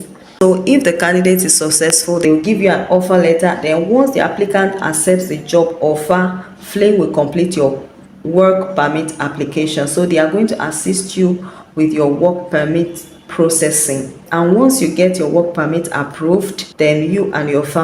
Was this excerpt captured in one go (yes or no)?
no